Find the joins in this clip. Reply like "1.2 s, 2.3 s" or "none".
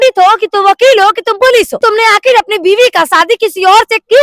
1.7 s